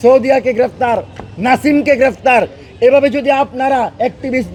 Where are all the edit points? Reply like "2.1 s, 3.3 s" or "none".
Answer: none